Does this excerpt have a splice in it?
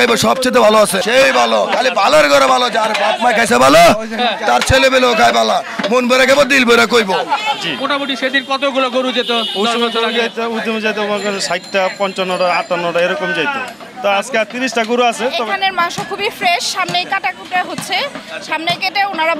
yes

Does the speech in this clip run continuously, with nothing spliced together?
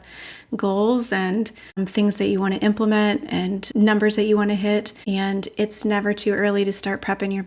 no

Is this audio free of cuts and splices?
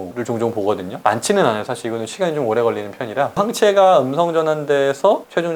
yes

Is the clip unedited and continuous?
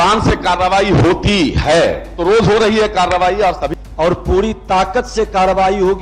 no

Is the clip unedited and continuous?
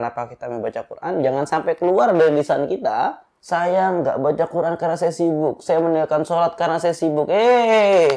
no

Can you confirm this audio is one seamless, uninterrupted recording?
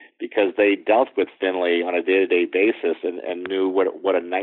yes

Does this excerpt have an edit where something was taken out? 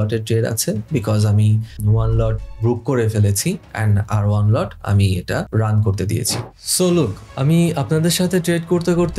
yes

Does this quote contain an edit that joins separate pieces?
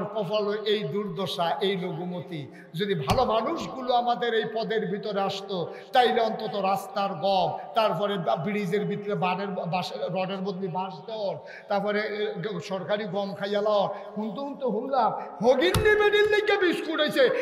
no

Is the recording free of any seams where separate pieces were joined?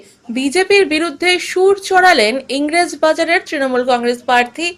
yes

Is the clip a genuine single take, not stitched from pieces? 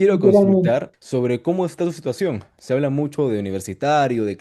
no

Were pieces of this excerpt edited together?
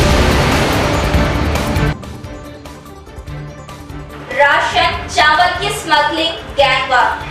yes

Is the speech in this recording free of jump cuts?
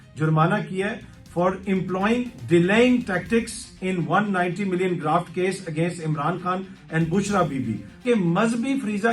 no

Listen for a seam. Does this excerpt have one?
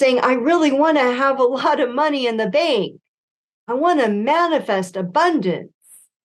no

